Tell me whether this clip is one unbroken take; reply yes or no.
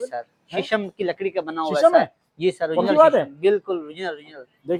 yes